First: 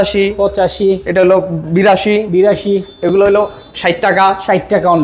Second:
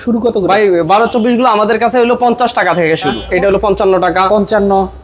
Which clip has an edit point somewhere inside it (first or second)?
second